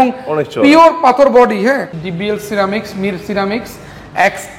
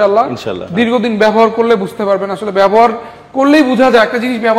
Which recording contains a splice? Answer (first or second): first